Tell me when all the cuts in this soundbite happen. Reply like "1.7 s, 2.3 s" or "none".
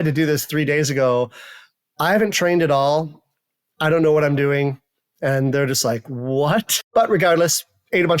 6.8 s